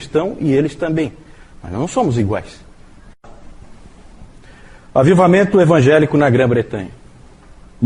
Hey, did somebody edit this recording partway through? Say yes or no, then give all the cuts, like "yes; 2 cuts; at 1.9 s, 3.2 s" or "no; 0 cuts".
no; 0 cuts